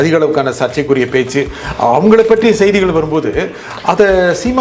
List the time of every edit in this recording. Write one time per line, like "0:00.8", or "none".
none